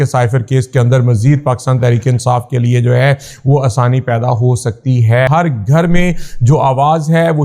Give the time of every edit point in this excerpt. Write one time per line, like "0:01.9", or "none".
0:05.3